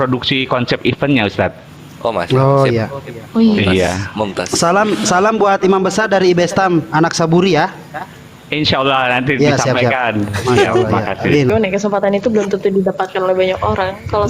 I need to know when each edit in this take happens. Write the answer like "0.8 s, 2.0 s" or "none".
11.5 s